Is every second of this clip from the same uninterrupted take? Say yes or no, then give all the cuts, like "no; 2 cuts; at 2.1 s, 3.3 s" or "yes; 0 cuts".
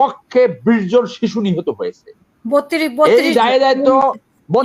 yes; 0 cuts